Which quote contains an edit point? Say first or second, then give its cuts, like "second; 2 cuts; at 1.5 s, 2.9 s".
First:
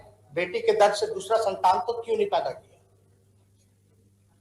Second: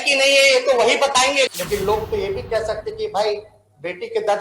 second; 1 cut; at 1.5 s